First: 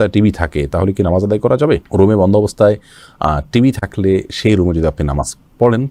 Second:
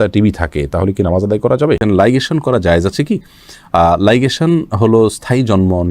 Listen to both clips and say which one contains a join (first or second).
second